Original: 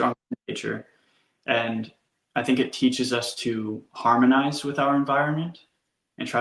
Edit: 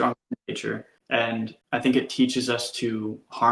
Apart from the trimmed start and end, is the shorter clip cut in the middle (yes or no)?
yes